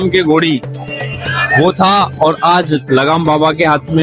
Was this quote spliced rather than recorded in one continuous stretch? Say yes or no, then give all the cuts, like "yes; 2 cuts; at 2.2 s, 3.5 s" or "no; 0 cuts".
no; 0 cuts